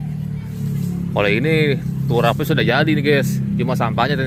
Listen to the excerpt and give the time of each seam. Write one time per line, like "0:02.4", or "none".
none